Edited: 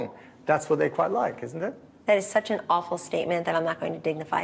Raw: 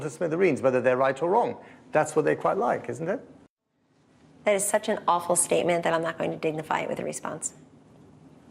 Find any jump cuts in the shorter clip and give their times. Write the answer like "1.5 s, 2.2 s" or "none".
1.9 s